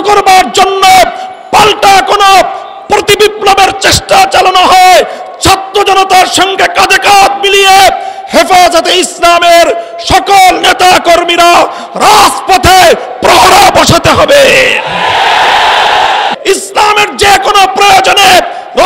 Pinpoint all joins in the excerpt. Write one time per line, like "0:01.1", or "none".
0:16.3